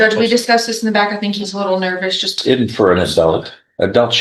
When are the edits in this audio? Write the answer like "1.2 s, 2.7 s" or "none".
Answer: 2.3 s